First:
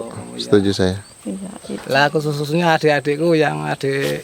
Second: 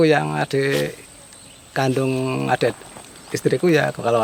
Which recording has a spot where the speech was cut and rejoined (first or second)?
first